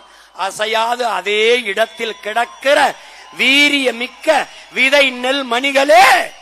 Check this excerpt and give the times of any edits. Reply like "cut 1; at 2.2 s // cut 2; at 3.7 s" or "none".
none